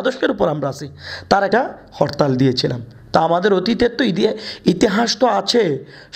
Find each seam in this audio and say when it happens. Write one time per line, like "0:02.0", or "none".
0:01.5